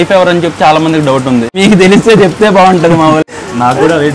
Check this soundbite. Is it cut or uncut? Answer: cut